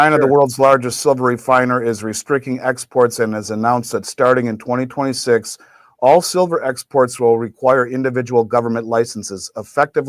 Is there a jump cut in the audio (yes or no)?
no